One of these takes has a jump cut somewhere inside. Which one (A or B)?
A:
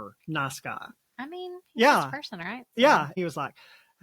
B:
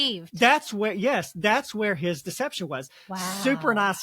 A